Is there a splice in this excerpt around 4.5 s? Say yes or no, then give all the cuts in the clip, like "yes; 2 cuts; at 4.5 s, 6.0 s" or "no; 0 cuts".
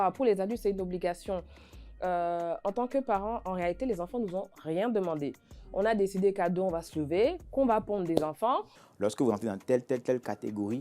no; 1 cut; at 8.8 s